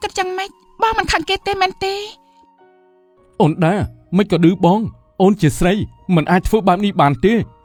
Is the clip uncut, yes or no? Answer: yes